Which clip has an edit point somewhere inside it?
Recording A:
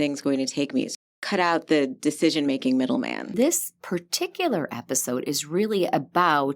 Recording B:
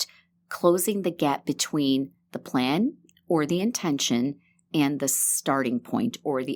A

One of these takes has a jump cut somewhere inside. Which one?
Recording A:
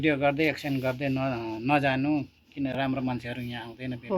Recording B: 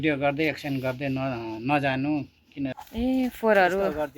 B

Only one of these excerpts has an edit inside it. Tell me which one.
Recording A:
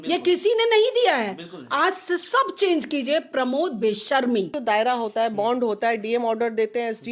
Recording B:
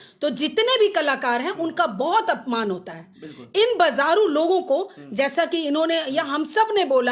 A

